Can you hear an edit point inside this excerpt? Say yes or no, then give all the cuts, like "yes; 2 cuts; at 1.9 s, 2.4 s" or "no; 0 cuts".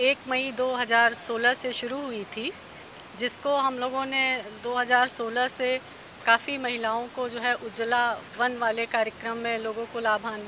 no; 0 cuts